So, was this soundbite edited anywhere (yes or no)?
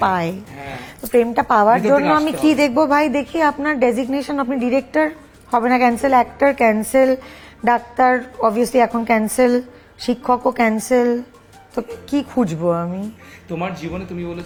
no